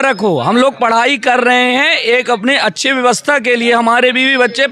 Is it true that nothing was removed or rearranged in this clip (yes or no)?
yes